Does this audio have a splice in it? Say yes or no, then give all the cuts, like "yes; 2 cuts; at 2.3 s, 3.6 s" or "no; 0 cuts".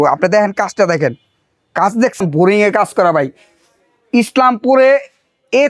yes; 1 cut; at 2.2 s